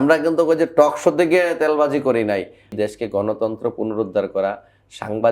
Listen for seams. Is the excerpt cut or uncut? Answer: cut